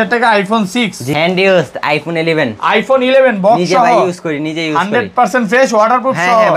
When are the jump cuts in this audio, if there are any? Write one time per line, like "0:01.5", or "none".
0:01.0